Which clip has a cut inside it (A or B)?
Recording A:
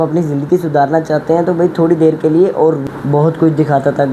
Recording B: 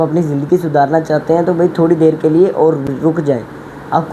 A